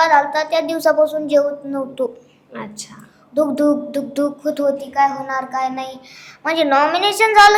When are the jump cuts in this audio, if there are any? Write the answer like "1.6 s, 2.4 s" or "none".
none